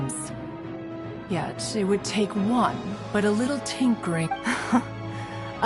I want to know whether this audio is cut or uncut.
cut